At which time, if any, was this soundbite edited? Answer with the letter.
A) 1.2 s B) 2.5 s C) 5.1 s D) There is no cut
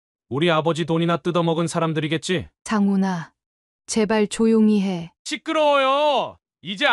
C